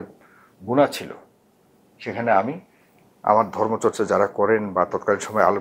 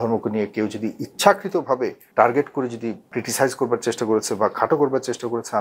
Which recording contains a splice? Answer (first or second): second